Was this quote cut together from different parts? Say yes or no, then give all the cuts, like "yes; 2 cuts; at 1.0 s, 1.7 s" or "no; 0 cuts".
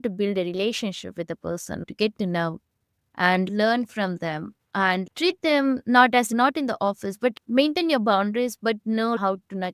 no; 0 cuts